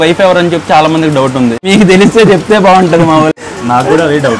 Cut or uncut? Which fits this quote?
cut